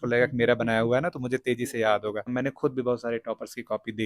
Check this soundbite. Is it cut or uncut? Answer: cut